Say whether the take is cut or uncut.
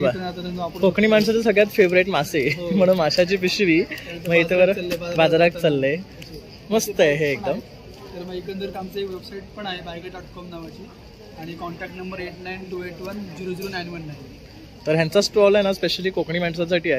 uncut